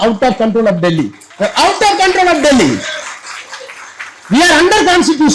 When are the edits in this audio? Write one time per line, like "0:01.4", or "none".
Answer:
0:01.2